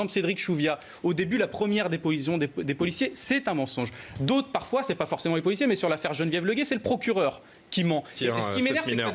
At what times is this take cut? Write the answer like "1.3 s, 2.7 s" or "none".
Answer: 8.2 s